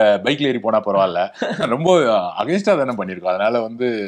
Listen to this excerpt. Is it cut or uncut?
uncut